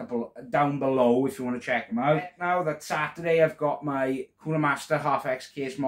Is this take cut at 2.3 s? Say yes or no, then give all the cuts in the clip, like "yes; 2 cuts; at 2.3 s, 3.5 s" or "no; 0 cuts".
yes; 1 cut; at 2.3 s